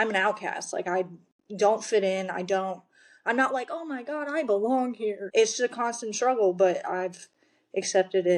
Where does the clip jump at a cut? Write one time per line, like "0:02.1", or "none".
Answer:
0:05.2